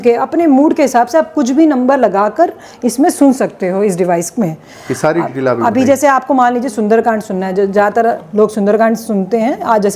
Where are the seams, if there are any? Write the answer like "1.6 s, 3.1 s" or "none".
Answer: 4.6 s